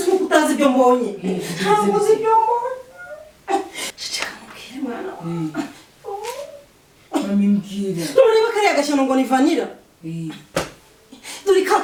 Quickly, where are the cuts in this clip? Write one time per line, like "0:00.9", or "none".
none

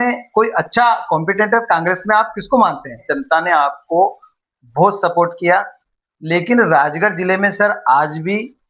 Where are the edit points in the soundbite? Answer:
0:03.1

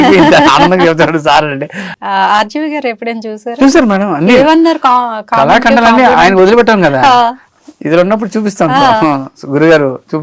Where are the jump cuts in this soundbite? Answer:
0:01.8

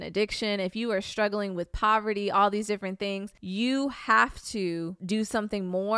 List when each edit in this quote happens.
0:03.3
0:04.9

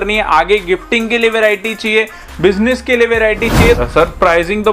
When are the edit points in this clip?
0:03.8

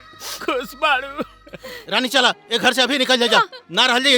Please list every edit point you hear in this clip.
0:01.8

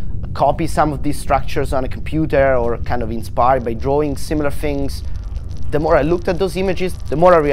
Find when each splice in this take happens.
0:02.8

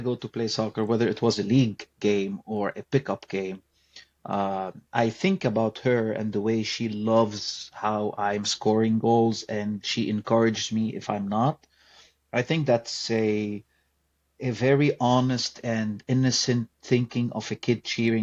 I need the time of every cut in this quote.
none

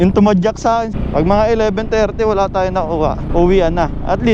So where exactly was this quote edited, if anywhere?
0:00.9

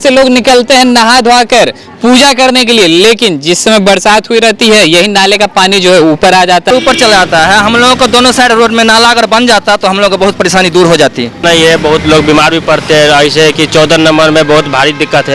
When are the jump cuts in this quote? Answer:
0:06.7
0:11.4

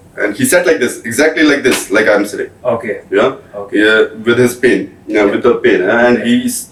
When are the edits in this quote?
none

